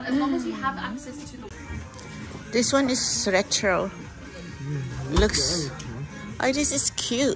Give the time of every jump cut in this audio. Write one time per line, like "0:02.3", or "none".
0:01.5

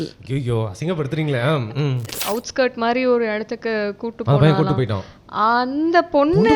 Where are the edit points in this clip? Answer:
0:02.1

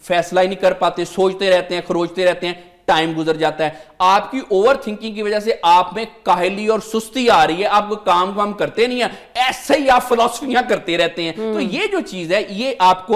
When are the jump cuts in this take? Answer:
none

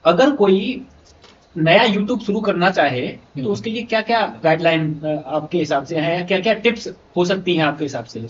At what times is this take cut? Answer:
none

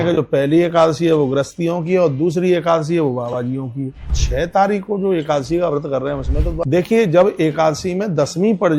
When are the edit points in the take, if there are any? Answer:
0:04.2
0:06.6

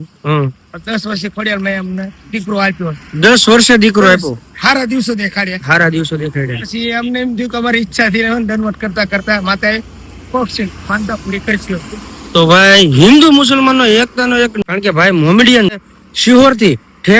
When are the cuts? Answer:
0:14.6
0:15.7

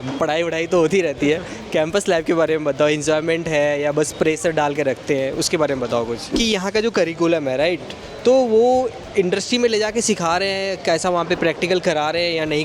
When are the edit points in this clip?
0:06.3

